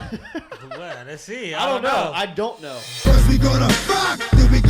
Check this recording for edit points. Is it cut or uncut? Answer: cut